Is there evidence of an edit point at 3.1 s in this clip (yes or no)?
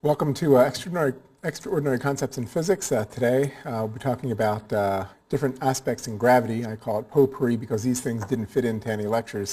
yes